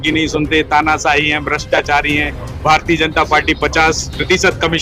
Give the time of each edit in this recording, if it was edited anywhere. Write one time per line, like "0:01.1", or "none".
none